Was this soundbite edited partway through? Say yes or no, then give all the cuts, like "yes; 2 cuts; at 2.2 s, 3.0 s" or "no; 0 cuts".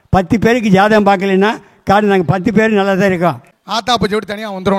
yes; 1 cut; at 3.5 s